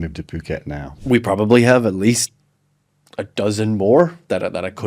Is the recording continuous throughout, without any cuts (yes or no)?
no